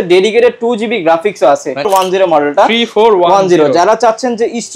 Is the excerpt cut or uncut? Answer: cut